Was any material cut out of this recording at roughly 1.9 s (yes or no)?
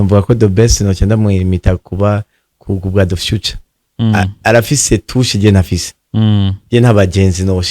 no